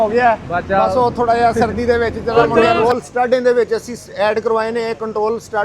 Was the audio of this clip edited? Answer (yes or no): yes